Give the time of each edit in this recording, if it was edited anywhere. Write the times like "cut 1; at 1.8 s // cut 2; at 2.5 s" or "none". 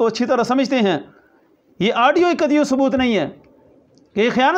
none